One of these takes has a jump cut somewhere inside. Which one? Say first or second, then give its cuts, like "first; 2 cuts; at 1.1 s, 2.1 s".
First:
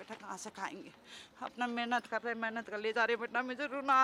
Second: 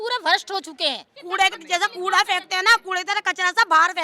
second; 1 cut; at 1.1 s